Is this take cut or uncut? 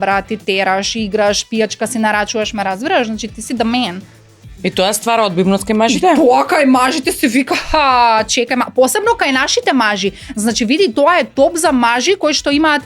uncut